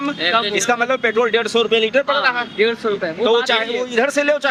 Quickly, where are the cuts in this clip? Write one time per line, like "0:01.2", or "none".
none